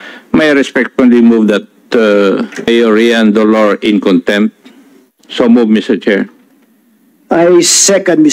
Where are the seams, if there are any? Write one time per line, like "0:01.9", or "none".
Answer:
0:02.7